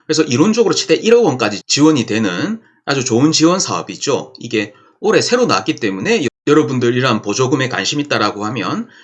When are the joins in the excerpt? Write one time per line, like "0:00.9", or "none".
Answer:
none